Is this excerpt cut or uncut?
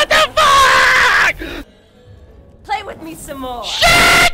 cut